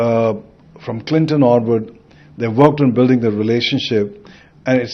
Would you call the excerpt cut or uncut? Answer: uncut